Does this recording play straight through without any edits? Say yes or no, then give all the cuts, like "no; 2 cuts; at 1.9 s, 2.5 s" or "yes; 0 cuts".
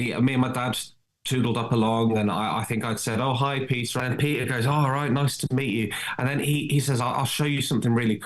no; 1 cut; at 3.9 s